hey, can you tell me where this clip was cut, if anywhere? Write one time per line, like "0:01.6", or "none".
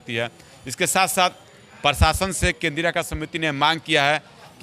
none